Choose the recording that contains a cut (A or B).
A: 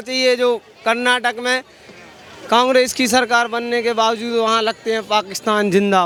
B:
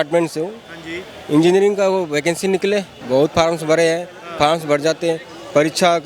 B